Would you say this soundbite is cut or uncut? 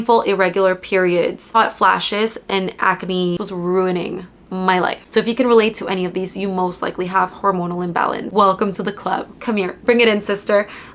cut